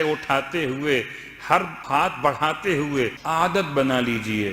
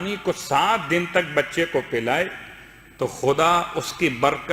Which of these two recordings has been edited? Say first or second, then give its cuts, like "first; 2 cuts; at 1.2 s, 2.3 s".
first; 2 cuts; at 1.8 s, 3.2 s